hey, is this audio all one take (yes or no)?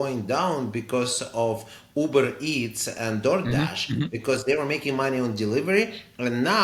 yes